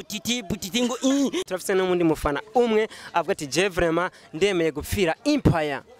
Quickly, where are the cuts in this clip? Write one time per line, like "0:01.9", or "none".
none